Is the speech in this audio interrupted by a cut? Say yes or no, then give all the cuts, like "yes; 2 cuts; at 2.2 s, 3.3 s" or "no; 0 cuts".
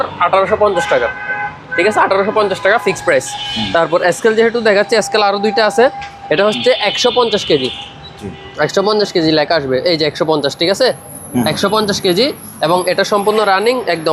no; 0 cuts